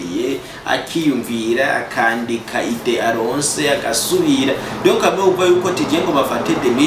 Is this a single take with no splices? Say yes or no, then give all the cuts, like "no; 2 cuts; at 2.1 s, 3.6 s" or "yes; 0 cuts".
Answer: yes; 0 cuts